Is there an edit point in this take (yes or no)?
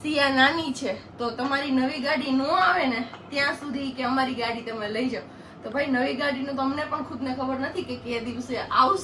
no